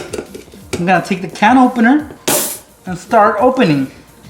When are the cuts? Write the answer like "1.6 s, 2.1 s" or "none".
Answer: 2.2 s